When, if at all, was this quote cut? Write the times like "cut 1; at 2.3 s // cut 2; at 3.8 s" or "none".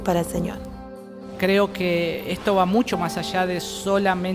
cut 1; at 1.1 s